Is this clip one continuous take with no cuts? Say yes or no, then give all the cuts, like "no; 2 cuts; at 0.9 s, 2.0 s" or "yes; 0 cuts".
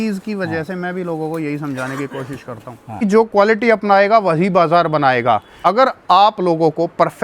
no; 2 cuts; at 3.0 s, 5.5 s